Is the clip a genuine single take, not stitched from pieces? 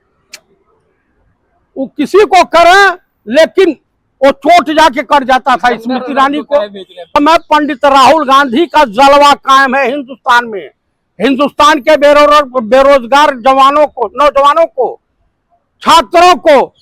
no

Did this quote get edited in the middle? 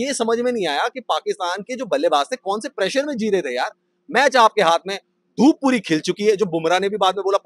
no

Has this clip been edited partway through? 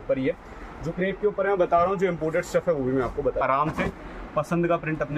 yes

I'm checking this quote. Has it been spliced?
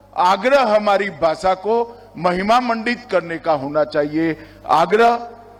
no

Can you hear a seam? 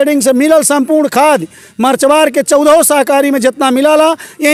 no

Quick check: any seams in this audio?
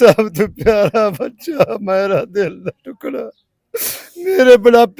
no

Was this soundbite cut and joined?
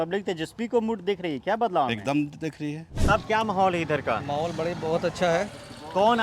yes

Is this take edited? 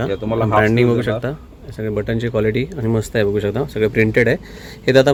no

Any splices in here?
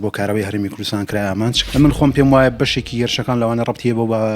yes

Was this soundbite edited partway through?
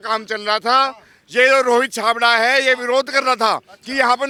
no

